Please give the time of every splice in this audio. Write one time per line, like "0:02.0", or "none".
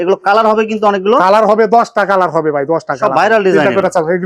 none